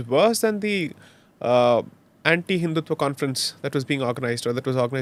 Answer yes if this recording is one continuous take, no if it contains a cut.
yes